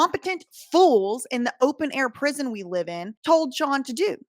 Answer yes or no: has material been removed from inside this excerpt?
yes